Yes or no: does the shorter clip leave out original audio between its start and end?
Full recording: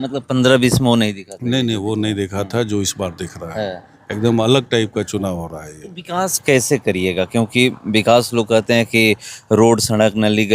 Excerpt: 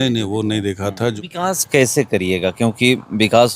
yes